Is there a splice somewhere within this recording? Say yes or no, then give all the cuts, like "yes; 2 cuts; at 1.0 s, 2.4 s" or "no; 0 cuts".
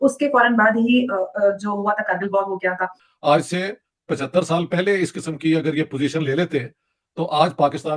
yes; 1 cut; at 3.0 s